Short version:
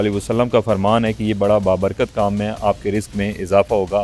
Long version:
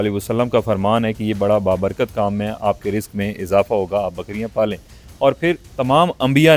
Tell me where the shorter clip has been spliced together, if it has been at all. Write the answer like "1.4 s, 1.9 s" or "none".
none

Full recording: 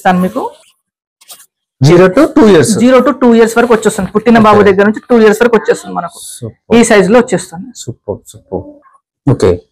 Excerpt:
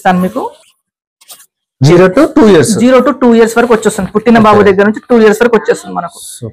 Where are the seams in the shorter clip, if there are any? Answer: none

